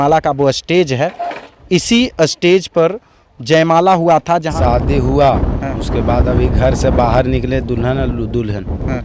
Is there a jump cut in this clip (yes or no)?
yes